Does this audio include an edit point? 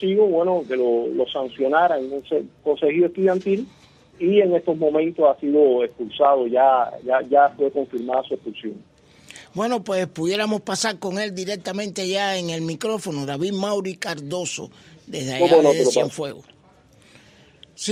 no; 0 cuts

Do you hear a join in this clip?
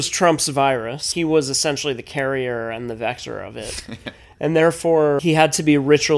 yes; 2 cuts; at 1.1 s, 5.2 s

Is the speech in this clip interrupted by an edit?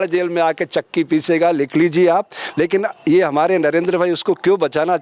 no; 0 cuts

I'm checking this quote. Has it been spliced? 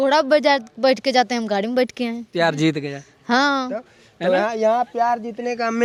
no; 0 cuts

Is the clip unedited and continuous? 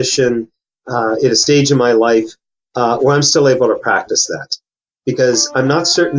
yes; 0 cuts

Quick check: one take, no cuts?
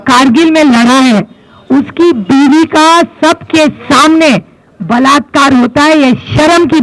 yes; 0 cuts

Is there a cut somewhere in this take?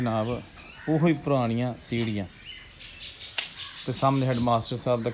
no; 0 cuts

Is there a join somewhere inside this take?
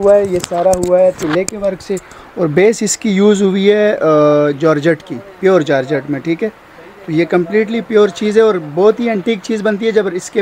no; 0 cuts

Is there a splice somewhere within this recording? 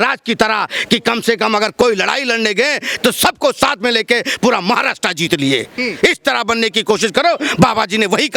no; 0 cuts

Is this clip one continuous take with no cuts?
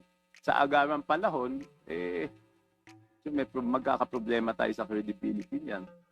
yes; 0 cuts

